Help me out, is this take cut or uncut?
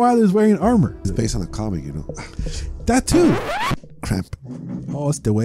cut